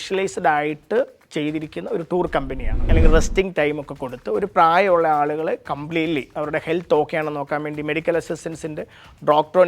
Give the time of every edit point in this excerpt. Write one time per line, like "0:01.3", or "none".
0:02.8